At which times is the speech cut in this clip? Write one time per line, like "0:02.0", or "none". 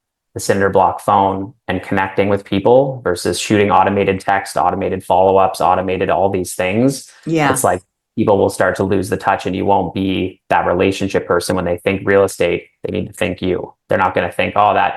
none